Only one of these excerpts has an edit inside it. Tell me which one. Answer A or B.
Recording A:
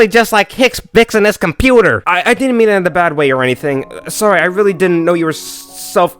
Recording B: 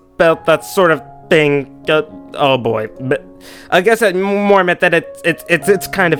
A